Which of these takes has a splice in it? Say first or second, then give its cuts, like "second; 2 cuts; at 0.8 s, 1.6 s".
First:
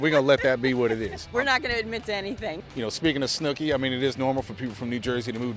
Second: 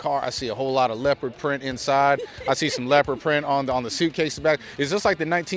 first; 2 cuts; at 1.2 s, 2.6 s